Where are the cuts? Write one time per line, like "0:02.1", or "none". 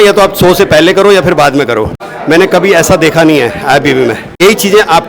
0:02.1
0:04.4